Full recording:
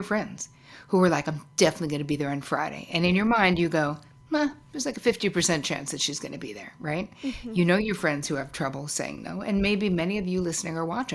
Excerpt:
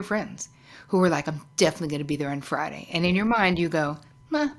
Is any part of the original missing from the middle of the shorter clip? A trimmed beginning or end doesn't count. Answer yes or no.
no